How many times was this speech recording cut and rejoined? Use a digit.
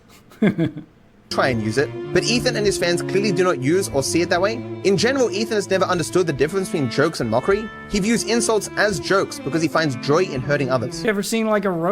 2